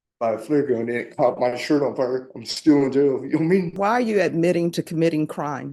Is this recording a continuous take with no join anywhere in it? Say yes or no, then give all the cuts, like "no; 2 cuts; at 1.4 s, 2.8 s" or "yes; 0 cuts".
no; 1 cut; at 3.8 s